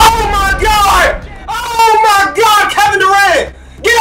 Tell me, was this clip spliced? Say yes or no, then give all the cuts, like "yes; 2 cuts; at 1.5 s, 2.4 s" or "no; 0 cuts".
no; 0 cuts